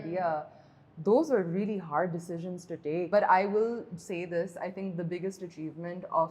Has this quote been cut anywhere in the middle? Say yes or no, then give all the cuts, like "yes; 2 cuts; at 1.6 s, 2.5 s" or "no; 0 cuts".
yes; 1 cut; at 3.1 s